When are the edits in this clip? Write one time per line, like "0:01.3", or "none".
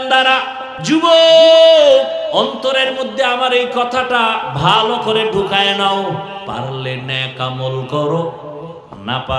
0:00.9
0:02.3
0:06.4